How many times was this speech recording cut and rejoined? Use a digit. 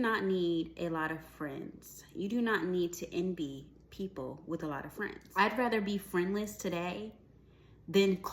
1